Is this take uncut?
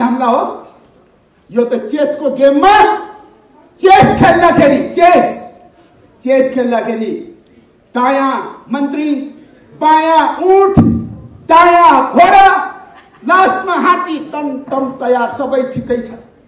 yes; 0 cuts

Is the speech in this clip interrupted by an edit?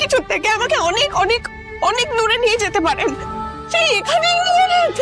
yes; 1 cut; at 3.2 s

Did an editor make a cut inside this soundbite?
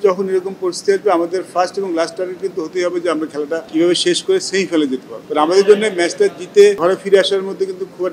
yes; 3 cuts; at 3.7 s, 5.1 s, 6.8 s

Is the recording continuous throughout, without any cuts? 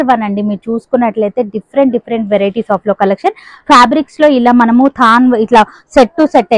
yes; 0 cuts

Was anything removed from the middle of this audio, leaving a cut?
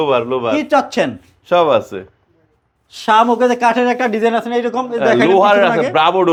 no; 0 cuts

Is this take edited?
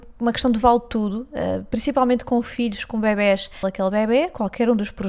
yes; 1 cut; at 3.7 s

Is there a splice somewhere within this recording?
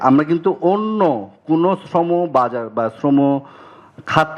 no; 0 cuts

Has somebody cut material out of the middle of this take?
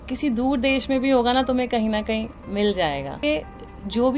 yes; 1 cut; at 3.1 s

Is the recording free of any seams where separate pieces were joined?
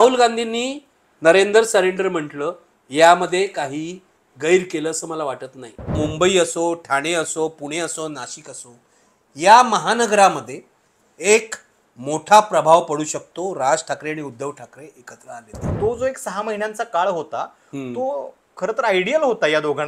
no; 2 cuts; at 5.9 s, 15.7 s

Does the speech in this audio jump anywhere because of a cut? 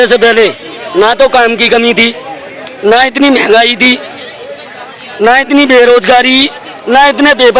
no; 0 cuts

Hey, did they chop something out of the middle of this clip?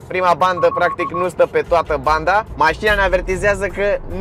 yes; 1 cut; at 2.5 s

